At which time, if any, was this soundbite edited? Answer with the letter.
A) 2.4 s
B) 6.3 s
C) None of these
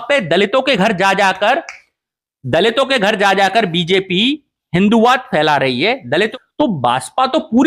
B